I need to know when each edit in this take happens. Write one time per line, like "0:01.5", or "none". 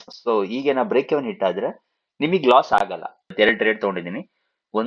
0:03.3